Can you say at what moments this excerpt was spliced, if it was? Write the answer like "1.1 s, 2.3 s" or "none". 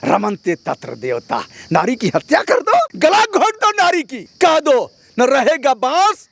2.9 s, 4.2 s